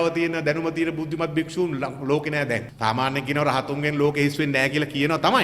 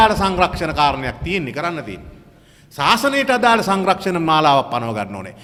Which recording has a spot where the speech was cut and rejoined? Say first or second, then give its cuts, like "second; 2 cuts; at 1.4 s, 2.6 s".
first; 1 cut; at 2.7 s